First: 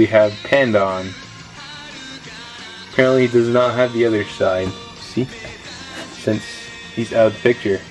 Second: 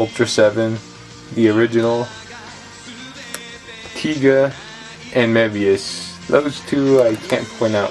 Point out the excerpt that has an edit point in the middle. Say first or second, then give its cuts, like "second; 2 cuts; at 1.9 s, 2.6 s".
first; 1 cut; at 3.3 s